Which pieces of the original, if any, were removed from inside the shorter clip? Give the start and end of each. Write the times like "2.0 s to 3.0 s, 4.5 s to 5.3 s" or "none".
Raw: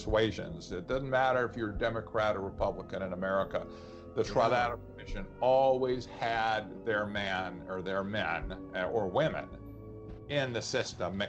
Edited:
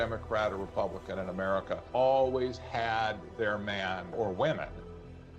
3.6 s to 5.3 s, 7.6 s to 8.9 s